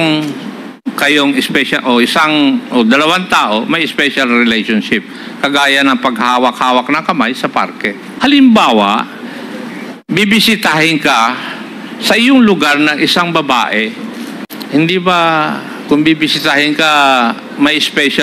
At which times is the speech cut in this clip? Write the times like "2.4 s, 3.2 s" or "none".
8.0 s, 14.4 s